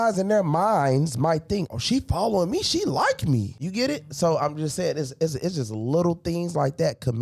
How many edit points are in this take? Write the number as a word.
zero